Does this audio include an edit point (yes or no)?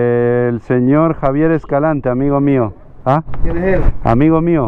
no